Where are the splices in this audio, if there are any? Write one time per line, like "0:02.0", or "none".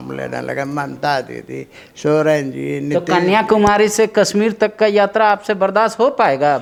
none